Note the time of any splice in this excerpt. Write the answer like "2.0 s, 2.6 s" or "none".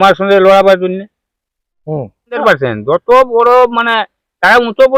2.4 s